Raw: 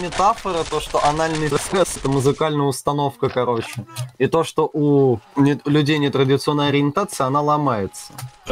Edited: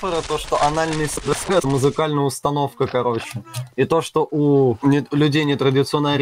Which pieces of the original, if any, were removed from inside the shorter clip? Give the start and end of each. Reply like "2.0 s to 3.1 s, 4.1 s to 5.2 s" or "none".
5.2 s to 5.3 s